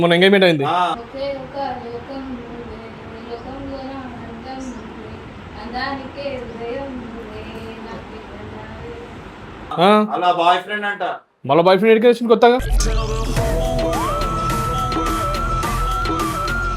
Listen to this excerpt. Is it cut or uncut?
uncut